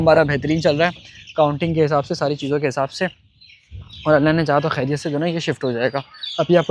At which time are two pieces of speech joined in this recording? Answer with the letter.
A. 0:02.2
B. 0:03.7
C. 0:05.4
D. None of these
D